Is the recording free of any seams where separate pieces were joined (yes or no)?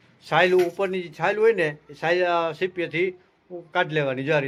yes